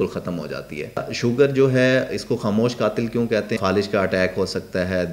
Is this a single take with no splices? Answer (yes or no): no